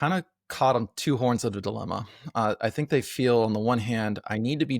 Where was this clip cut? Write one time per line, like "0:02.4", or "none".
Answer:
none